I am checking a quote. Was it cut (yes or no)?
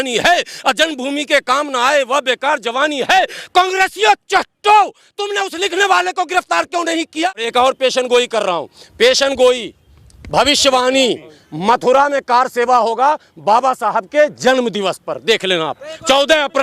yes